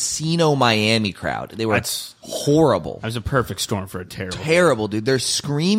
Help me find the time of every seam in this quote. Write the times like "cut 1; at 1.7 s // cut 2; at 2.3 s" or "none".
none